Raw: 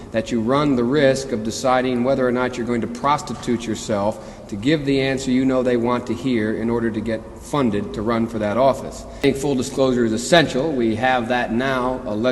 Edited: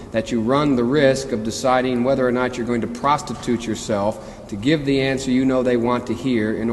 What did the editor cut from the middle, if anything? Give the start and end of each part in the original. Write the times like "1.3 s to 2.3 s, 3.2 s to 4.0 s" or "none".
none